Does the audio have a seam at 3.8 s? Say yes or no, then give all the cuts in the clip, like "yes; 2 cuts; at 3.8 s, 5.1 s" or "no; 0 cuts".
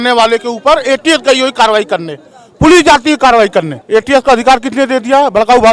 yes; 1 cut; at 3.8 s